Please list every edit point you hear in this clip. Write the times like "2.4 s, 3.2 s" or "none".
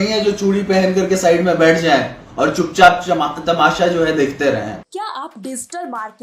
4.8 s